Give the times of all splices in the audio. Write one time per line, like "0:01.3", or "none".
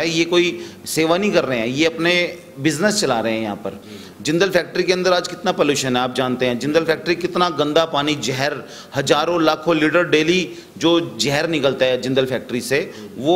none